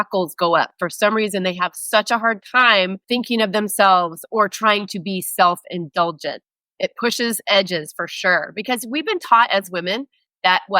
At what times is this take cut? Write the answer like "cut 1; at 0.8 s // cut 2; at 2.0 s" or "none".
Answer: cut 1; at 3.0 s